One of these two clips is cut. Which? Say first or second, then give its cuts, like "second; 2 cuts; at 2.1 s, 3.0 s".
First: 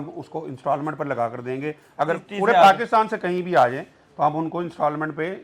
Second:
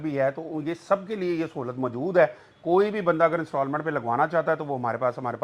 first; 1 cut; at 2.2 s